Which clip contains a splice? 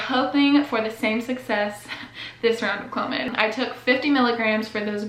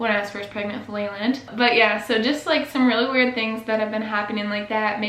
second; 1 cut; at 1.4 s

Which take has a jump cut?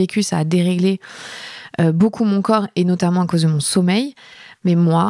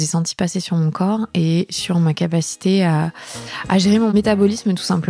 second; 1 cut; at 4.1 s

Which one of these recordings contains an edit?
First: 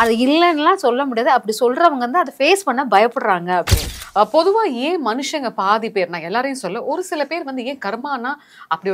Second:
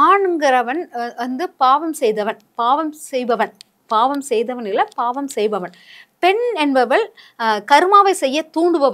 first; 1 cut; at 3.8 s

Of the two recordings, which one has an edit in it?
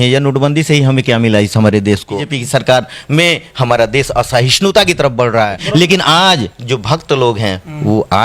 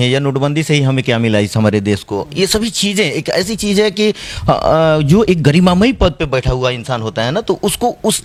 first; 2 cuts; at 2.2 s, 5.6 s

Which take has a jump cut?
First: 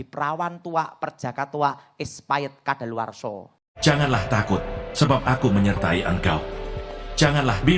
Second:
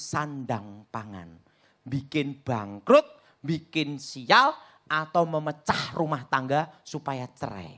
first; 1 cut; at 3.6 s

